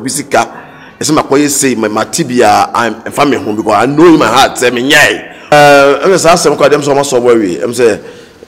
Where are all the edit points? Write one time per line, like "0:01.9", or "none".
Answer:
0:05.5